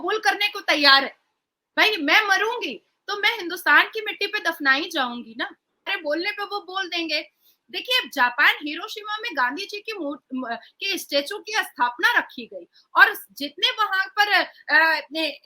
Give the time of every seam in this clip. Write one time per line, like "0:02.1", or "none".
0:05.9